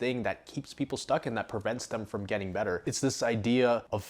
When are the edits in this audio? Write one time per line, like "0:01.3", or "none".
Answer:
0:02.8